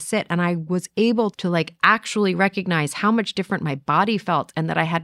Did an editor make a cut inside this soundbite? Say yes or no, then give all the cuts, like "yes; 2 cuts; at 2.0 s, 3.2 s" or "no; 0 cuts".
yes; 1 cut; at 1.3 s